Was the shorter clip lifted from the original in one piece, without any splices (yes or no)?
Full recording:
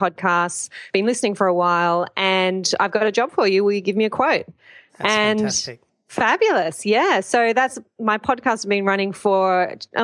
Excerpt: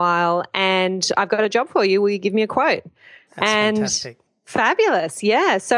yes